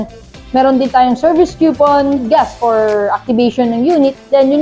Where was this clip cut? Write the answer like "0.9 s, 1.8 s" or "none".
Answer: 2.2 s